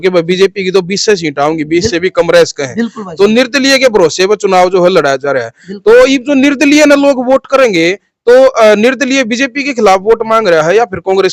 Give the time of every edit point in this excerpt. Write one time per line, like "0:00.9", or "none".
none

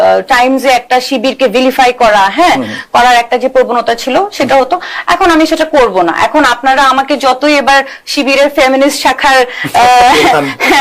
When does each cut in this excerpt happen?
none

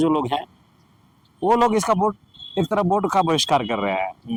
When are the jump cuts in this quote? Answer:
none

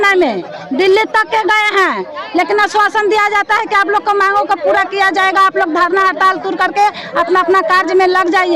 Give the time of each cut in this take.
none

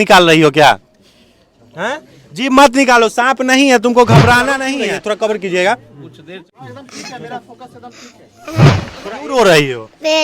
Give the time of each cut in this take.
0:04.7
0:08.7

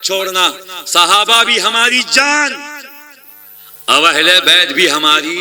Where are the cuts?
none

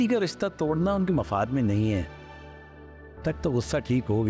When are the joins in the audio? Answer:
none

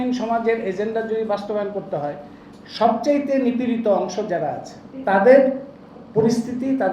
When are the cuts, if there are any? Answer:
0:05.0

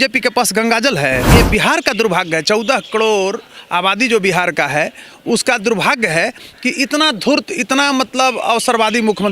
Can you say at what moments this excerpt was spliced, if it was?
0:01.3

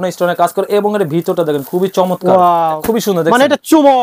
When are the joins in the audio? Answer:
0:02.8

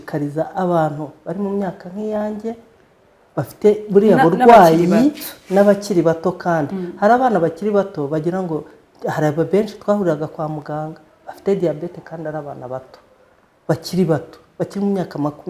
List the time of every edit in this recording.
none

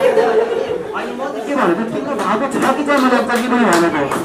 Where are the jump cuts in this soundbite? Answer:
none

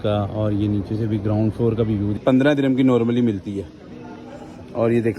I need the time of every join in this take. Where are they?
0:02.2

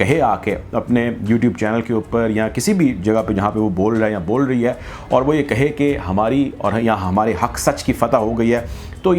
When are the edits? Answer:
none

